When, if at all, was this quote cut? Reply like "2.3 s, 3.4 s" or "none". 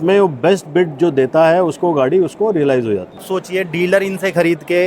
3.2 s